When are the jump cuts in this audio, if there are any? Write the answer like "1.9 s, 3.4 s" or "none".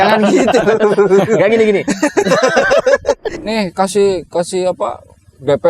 3.3 s